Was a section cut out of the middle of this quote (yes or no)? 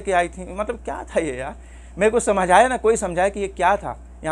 no